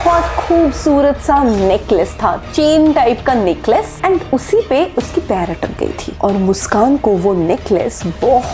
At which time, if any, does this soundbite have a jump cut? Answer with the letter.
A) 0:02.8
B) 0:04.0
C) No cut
C